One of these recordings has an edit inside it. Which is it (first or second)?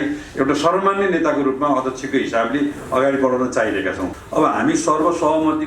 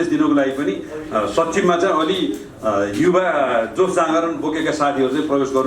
first